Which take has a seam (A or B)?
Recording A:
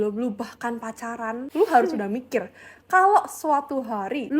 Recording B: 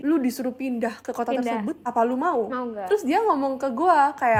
A